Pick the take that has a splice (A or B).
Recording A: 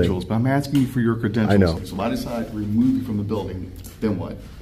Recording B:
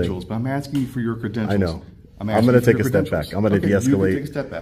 A